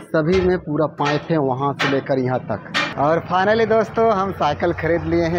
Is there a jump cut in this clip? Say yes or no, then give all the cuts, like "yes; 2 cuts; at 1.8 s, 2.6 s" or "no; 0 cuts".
yes; 1 cut; at 2.8 s